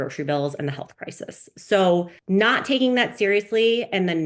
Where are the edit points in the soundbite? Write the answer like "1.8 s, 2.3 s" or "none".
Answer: 2.2 s